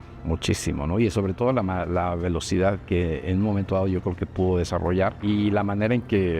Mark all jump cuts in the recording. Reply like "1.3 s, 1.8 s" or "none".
5.2 s